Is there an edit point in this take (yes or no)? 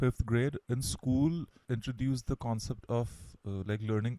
yes